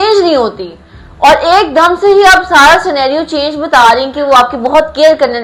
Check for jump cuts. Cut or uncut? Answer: uncut